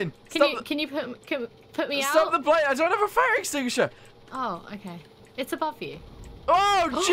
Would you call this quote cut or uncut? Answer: uncut